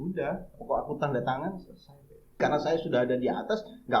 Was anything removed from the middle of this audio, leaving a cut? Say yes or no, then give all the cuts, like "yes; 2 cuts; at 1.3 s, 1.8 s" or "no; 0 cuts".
yes; 1 cut; at 2.4 s